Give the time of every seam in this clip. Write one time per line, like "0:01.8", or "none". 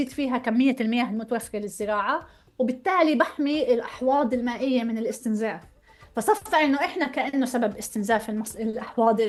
none